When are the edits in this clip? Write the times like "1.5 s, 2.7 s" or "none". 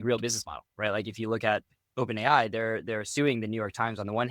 1.8 s